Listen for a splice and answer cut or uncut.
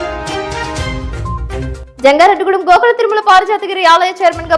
cut